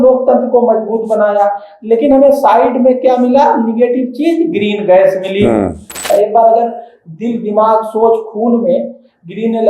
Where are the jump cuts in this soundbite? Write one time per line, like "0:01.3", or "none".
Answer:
0:06.1

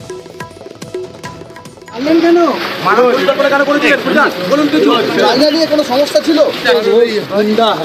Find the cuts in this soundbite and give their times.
0:01.4

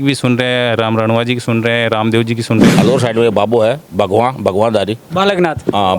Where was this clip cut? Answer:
0:02.7

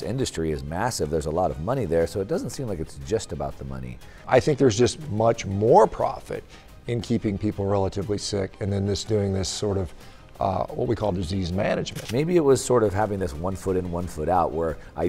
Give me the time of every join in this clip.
0:04.2
0:12.0

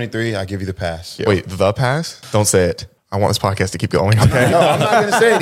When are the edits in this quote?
0:01.1
0:02.2

